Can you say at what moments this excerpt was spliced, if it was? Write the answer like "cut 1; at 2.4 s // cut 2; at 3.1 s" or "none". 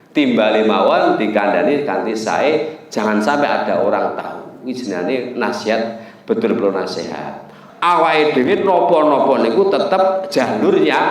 cut 1; at 7.6 s